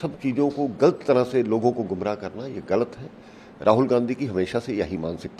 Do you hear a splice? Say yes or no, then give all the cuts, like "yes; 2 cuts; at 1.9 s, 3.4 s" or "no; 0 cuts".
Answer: no; 0 cuts